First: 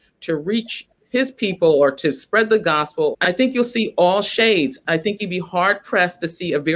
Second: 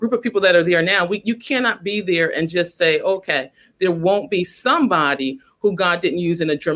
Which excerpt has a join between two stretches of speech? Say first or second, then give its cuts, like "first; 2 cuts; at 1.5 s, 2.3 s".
first; 3 cuts; at 0.9 s, 3.1 s, 4.8 s